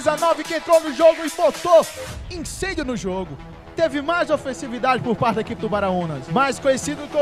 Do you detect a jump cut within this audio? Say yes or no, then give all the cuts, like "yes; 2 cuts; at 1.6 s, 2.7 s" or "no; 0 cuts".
yes; 1 cut; at 6.2 s